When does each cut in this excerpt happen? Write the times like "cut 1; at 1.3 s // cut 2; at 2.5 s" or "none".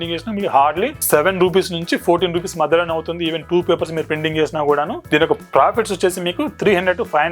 cut 1; at 1.0 s // cut 2; at 5.0 s